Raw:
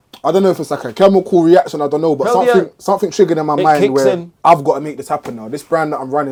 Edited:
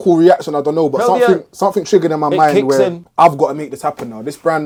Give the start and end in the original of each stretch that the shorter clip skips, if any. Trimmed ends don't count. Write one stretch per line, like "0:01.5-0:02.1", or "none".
none